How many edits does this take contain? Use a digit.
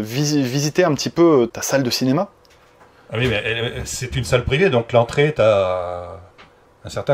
1